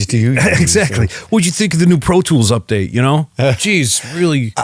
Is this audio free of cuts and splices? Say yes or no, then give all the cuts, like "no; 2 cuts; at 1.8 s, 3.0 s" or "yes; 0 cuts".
yes; 0 cuts